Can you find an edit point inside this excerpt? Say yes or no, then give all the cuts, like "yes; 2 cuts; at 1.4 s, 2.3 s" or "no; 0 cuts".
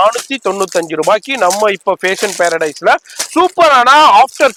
no; 0 cuts